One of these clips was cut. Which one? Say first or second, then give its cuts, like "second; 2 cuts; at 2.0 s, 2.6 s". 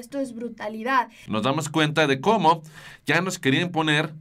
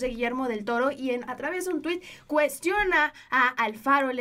first; 1 cut; at 1.2 s